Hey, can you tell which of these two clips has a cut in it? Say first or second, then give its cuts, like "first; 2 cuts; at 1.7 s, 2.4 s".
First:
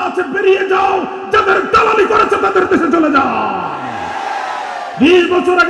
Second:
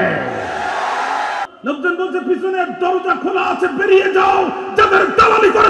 second; 1 cut; at 1.5 s